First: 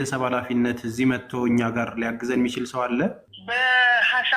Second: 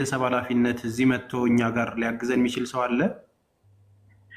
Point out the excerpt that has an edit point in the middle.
first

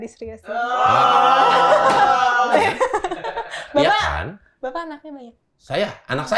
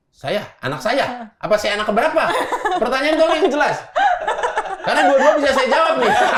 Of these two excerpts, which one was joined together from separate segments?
first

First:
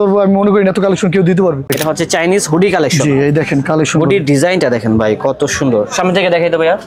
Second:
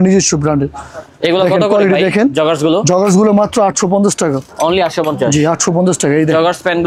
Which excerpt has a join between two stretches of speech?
first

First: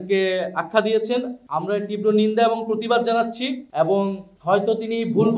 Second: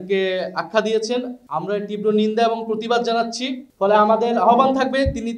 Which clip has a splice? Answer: second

